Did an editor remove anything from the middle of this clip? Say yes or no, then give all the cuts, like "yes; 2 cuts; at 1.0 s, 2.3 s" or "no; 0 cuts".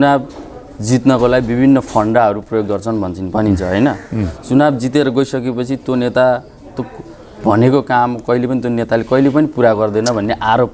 no; 0 cuts